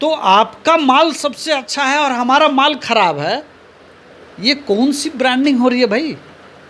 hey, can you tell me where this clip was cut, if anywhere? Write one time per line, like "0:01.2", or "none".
none